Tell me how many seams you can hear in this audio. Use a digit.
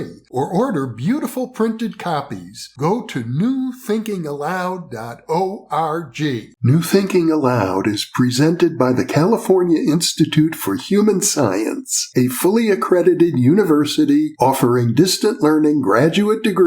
1